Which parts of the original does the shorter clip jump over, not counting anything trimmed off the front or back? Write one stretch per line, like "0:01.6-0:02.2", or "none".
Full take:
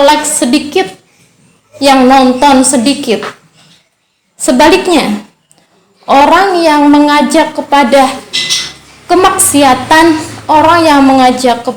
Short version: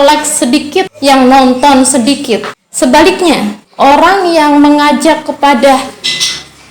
0:00.9-0:01.7
0:03.4-0:04.2
0:05.2-0:05.9